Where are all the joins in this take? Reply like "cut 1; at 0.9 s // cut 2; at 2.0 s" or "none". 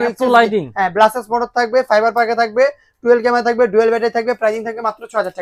none